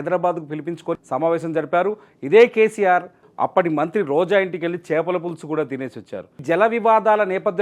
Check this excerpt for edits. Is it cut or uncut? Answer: cut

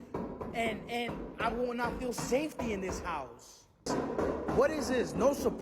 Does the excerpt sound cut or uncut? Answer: cut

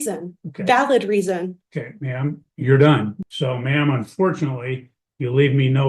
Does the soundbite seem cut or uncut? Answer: cut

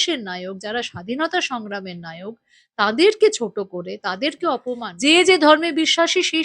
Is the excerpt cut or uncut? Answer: cut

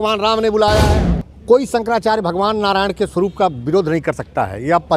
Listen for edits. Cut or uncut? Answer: cut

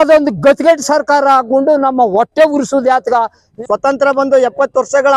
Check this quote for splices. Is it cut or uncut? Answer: cut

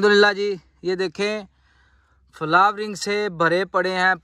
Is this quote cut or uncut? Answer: uncut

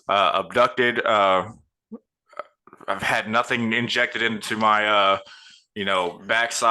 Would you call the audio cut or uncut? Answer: uncut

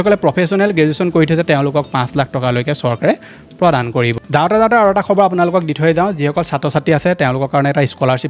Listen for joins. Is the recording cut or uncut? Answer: uncut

